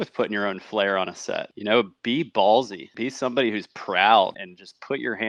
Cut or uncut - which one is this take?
uncut